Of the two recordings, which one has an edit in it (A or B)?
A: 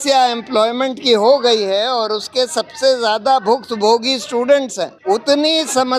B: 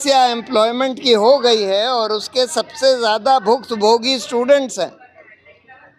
A